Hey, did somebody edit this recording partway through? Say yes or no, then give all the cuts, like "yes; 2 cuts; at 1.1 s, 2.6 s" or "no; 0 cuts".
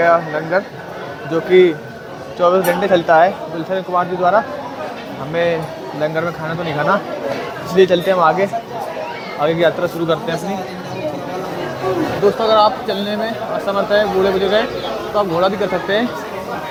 no; 0 cuts